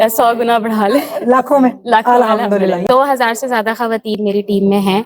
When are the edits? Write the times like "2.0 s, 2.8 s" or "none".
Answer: 2.8 s